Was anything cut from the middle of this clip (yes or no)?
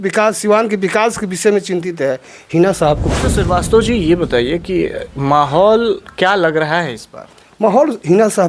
yes